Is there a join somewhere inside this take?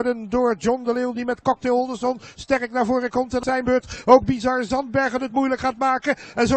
yes; 1 cut; at 3.4 s

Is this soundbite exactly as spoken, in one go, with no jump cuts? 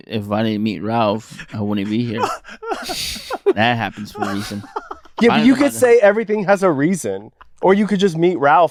yes; 0 cuts

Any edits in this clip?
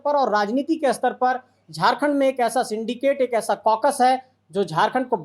no; 0 cuts

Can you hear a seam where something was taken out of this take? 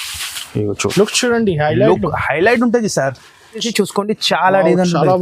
yes; 1 cut; at 3.7 s

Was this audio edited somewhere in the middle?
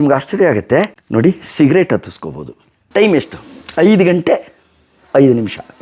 yes; 2 cuts; at 1.0 s, 2.7 s

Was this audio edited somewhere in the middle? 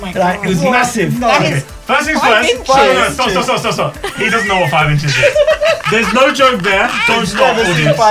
no; 0 cuts

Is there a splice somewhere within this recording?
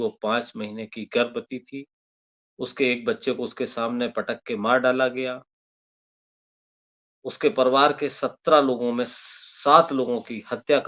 no; 0 cuts

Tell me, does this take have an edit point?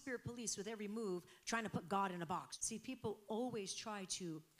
yes; 1 cut; at 2.5 s

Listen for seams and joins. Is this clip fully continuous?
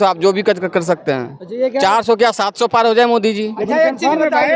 yes; 0 cuts

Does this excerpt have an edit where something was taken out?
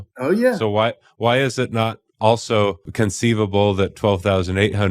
yes; 1 cut; at 2.9 s

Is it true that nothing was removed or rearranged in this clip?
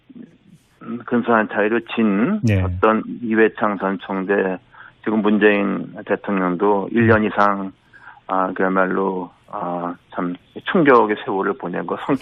yes; 0 cuts

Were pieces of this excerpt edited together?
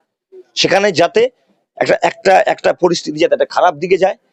no; 0 cuts

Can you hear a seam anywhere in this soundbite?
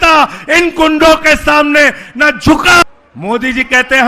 yes; 1 cut; at 2.8 s

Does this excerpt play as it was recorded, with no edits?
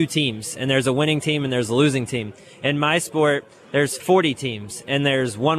no; 1 cut; at 4.0 s

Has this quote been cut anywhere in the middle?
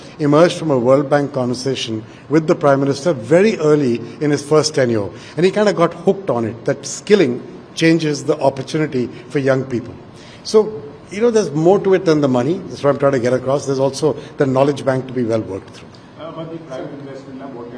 no; 0 cuts

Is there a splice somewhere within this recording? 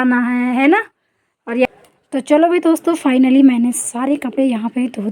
yes; 1 cut; at 1.7 s

